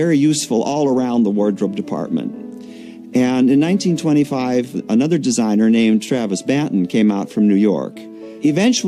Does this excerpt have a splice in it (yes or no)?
no